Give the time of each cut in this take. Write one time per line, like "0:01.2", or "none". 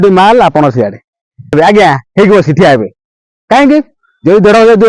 0:01.5